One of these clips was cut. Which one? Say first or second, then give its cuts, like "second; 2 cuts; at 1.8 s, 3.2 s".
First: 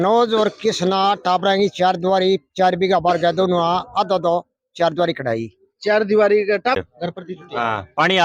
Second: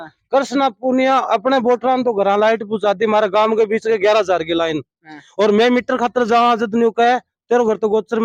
first; 1 cut; at 6.7 s